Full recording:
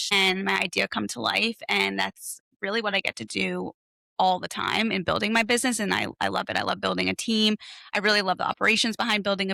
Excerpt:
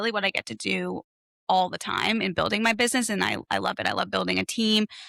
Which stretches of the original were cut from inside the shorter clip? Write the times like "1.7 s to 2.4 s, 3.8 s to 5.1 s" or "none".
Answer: none